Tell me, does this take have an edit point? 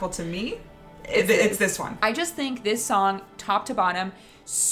yes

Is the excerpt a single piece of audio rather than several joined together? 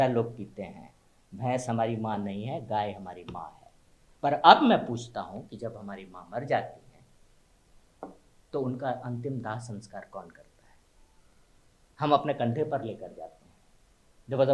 yes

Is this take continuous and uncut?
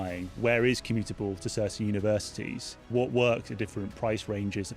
no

